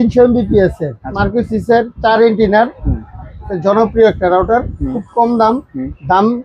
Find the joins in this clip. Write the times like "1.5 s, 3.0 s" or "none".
1.1 s